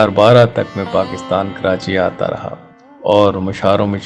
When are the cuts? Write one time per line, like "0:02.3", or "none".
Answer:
none